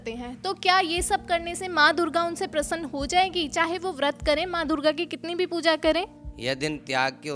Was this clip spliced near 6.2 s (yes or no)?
yes